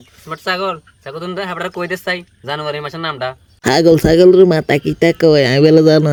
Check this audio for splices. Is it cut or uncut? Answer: uncut